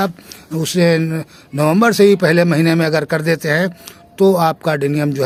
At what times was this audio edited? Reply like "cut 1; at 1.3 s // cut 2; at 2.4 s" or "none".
none